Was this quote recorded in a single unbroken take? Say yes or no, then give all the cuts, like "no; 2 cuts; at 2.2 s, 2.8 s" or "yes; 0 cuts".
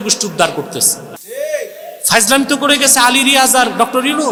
yes; 0 cuts